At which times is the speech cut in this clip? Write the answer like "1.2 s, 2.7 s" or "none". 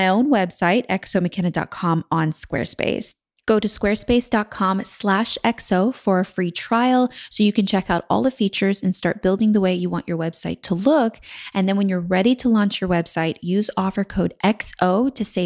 3.3 s